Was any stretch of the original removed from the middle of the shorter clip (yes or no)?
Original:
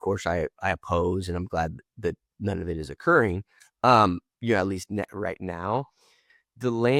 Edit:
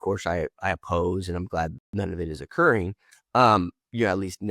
yes